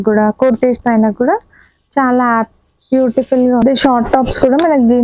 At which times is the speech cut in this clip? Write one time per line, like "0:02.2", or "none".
0:03.6

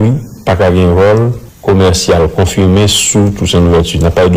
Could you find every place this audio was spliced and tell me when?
0:01.4

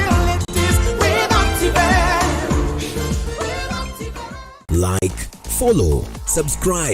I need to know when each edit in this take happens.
0:04.6

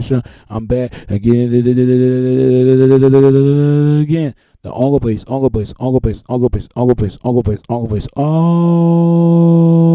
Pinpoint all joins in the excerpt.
none

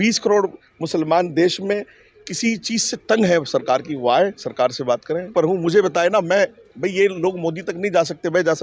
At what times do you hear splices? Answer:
0:05.3

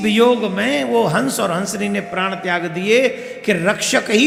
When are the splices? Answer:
none

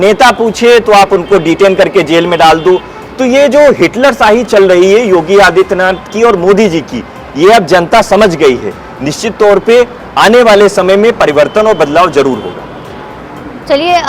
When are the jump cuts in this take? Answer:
none

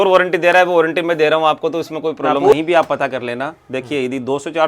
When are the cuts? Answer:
0:02.5

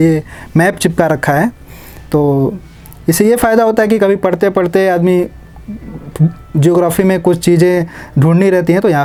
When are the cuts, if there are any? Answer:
none

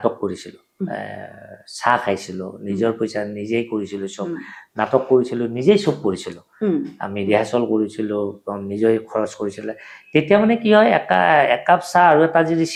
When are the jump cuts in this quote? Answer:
none

